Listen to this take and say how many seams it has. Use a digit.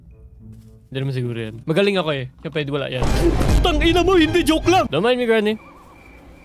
1